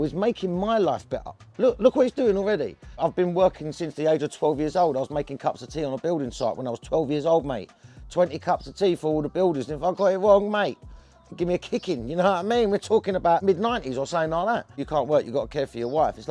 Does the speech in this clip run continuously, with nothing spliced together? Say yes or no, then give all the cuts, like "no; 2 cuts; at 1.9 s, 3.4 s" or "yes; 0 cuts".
no; 2 cuts; at 3.0 s, 14.8 s